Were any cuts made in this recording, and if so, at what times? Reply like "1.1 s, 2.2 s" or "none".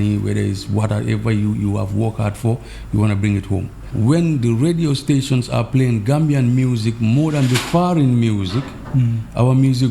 3.8 s